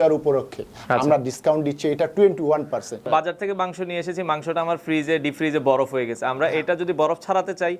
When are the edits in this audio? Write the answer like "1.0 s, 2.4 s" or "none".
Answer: 3.1 s